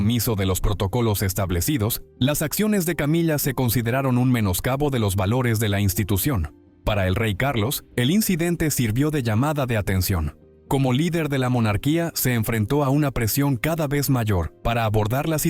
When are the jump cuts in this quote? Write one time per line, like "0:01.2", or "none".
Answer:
0:14.5